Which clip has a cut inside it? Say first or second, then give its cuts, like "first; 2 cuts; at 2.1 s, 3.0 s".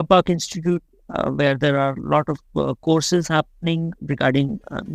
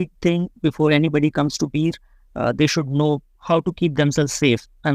first; 1 cut; at 4.0 s